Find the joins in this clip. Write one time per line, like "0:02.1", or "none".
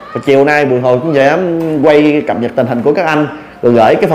none